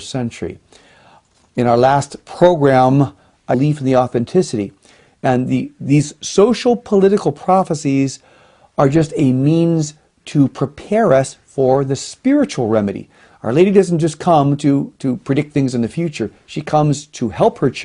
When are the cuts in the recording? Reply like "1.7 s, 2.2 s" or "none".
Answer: none